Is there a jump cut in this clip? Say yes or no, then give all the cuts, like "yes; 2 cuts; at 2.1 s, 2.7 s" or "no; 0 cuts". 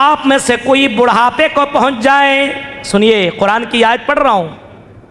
no; 0 cuts